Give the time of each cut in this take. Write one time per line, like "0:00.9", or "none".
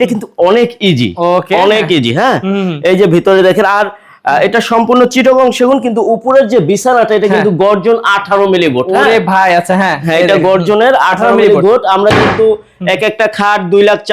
none